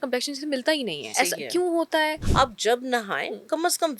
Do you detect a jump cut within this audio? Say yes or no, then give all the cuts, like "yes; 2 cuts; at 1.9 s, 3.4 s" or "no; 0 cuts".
yes; 2 cuts; at 1.1 s, 2.2 s